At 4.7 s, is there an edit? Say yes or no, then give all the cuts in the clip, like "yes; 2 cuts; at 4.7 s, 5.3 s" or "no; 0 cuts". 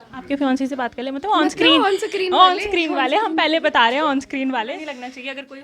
yes; 1 cut; at 4.7 s